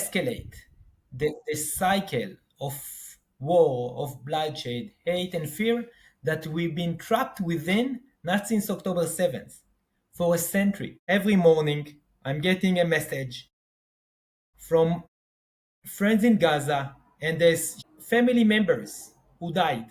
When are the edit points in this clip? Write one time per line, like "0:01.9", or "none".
0:10.9
0:17.8